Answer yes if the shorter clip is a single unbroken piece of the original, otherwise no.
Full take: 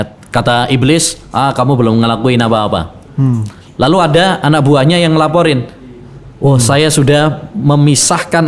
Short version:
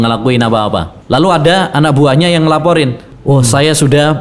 no